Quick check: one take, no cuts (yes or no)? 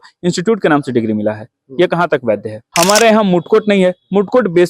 no